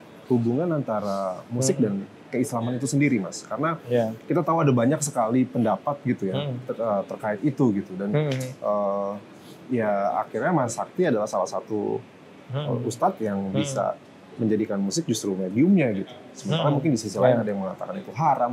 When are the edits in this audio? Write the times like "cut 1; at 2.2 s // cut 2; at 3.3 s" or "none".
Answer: none